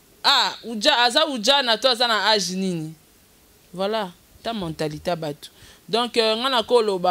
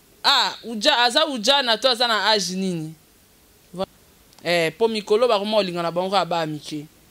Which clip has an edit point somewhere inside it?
second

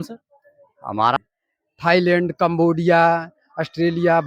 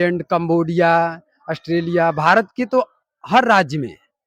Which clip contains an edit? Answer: first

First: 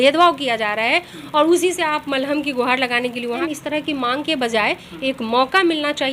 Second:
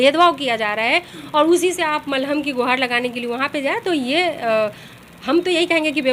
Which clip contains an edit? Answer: first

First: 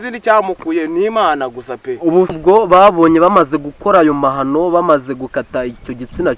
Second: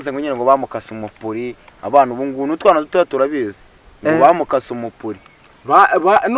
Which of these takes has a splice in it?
first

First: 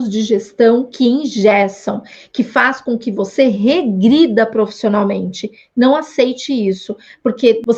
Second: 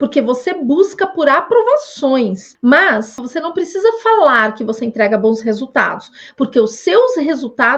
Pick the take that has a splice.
second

